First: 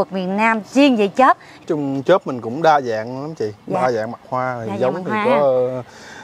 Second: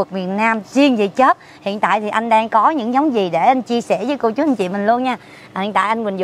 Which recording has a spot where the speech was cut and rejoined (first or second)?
first